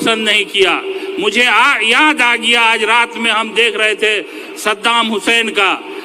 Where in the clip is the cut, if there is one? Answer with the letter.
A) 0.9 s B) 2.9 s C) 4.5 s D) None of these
D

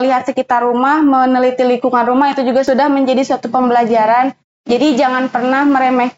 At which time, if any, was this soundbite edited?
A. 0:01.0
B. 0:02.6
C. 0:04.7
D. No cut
B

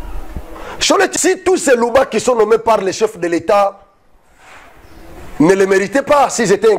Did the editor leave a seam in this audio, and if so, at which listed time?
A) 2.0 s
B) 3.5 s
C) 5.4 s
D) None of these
D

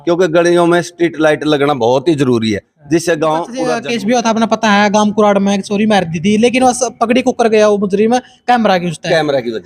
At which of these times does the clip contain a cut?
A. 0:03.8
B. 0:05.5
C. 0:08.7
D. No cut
A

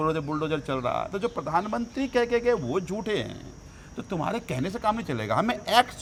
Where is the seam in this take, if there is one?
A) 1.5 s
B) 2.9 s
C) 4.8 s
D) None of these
D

